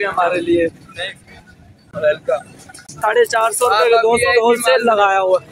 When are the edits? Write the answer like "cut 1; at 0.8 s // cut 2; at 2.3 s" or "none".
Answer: cut 1; at 3.0 s